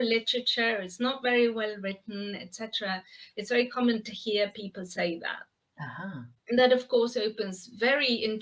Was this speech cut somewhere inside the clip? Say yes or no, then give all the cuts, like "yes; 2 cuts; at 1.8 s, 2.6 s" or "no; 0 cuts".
no; 0 cuts